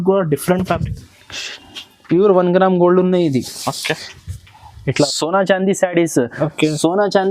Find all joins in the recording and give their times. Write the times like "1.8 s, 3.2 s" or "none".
5.0 s